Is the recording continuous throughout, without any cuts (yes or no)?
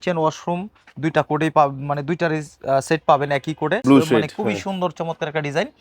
no